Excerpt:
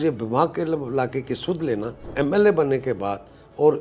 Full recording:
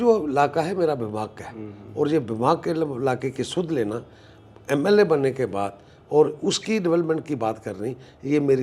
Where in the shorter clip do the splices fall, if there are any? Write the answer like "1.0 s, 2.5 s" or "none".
2.0 s